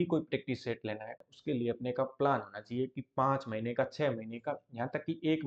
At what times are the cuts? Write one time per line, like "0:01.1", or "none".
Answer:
0:01.2